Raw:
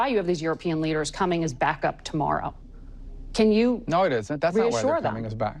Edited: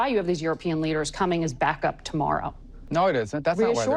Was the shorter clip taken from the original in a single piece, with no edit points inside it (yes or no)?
no